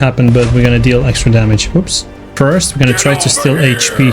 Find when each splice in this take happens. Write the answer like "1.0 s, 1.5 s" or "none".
2.3 s